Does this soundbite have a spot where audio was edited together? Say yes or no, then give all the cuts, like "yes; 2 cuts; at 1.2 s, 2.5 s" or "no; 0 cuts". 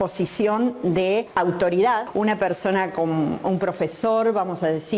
yes; 2 cuts; at 1.3 s, 2.1 s